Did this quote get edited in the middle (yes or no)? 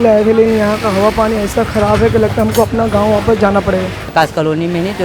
yes